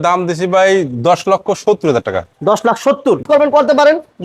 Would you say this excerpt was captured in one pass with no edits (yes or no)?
no